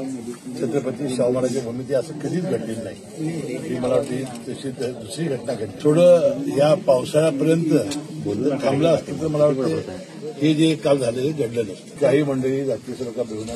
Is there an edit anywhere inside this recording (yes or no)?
yes